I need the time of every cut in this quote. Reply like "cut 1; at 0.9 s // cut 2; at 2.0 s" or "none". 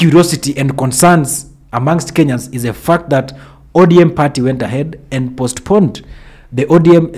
none